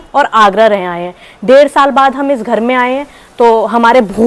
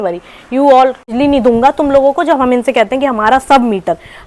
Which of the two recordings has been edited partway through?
second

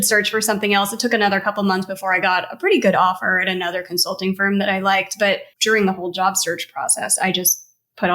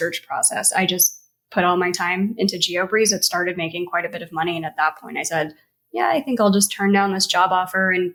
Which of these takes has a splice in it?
first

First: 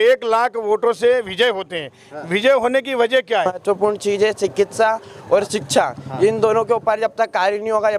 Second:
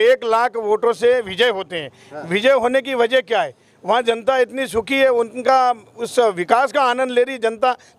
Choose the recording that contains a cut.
first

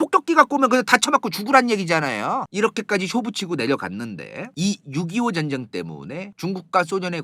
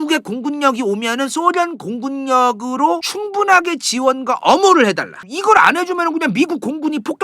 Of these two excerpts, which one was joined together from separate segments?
second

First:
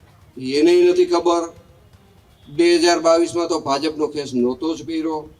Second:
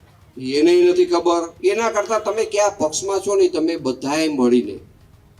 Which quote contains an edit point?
second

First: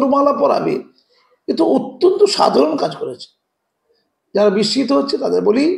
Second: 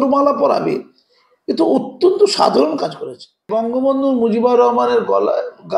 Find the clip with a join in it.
second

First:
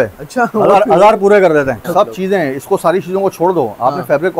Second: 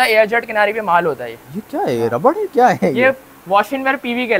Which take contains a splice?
first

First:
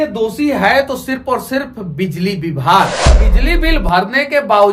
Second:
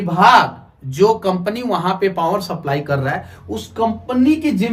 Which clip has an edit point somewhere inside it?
first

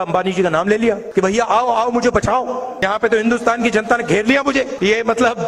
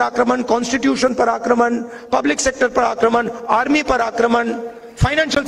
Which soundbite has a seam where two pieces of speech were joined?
first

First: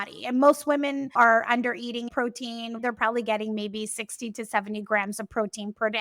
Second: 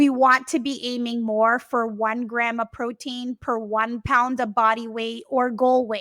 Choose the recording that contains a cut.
first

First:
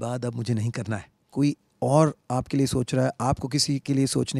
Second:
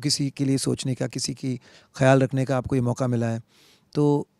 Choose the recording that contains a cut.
first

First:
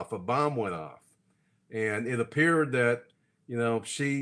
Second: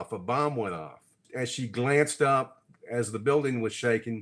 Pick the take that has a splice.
second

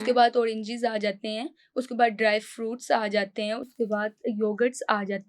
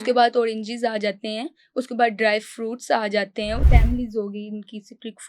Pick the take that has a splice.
second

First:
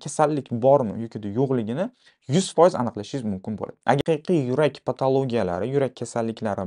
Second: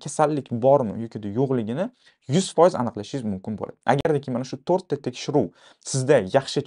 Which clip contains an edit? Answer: first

